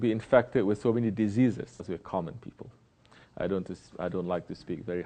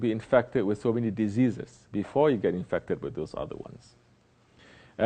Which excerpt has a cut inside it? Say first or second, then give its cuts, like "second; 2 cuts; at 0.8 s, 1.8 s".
second; 1 cut; at 1.7 s